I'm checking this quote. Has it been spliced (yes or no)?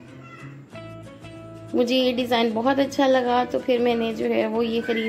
no